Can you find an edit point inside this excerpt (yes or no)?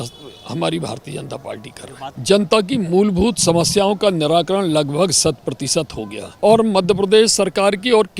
yes